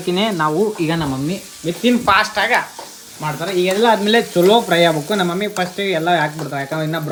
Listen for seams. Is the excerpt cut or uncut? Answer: uncut